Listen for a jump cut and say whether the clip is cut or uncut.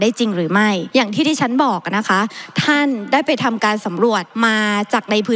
cut